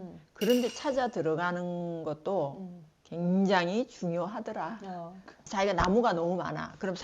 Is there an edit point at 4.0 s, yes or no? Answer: no